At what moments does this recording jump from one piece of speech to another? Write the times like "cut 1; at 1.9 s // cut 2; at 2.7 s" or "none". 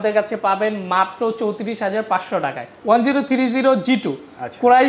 cut 1; at 2.7 s